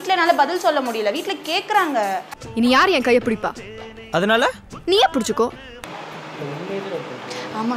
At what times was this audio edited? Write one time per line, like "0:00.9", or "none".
0:02.4
0:06.2